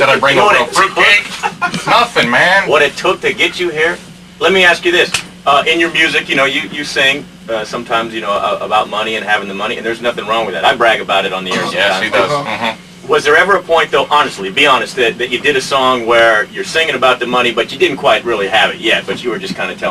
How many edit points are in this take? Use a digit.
0